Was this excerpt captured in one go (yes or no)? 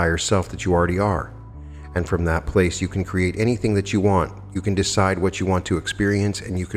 yes